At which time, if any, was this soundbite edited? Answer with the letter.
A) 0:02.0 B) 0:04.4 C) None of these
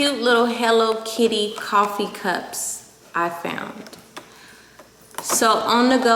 C